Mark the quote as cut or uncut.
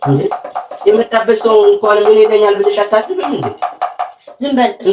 uncut